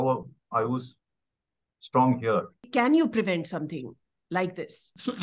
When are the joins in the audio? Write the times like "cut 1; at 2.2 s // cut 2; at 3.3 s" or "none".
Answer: cut 1; at 2.6 s